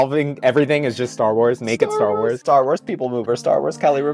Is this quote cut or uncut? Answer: cut